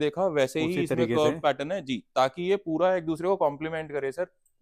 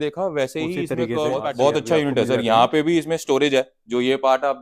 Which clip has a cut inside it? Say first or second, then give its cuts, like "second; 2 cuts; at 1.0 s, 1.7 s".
second; 1 cut; at 1.4 s